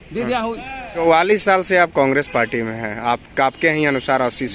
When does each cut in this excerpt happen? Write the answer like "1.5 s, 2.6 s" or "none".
1.0 s